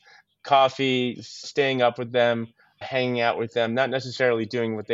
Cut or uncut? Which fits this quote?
cut